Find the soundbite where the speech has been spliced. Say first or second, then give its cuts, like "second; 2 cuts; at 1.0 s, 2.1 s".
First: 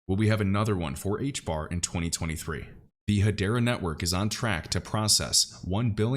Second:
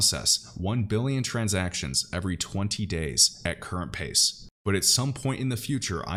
first; 1 cut; at 2.9 s